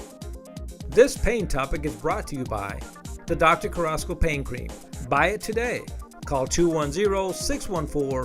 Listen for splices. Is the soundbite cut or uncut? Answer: cut